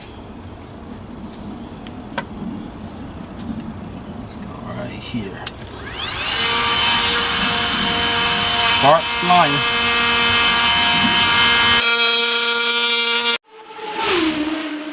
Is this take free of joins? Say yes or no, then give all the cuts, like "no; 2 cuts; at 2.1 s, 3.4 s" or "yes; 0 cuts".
no; 1 cut; at 13.8 s